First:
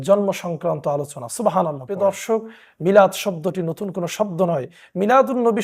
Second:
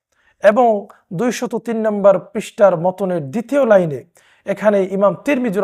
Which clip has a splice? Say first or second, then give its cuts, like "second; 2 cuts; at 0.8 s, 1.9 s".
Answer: first; 1 cut; at 1.8 s